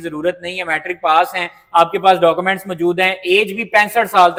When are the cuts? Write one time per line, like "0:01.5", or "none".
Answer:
none